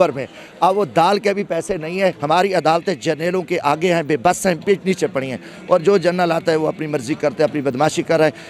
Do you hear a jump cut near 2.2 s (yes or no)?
yes